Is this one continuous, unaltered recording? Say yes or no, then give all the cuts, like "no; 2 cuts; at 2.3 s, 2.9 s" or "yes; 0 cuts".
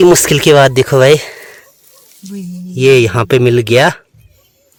yes; 0 cuts